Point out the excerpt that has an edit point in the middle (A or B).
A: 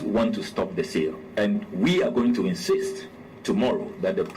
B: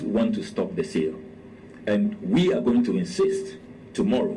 A